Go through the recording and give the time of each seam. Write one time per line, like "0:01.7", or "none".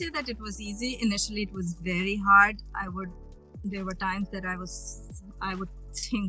none